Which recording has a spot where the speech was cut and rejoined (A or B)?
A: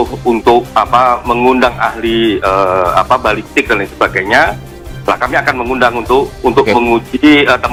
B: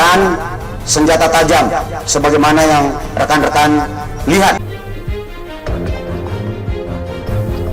B